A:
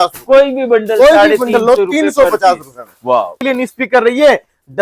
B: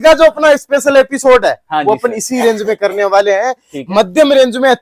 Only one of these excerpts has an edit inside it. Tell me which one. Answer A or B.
A